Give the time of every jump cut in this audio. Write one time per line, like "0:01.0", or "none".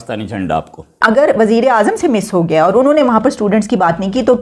0:01.0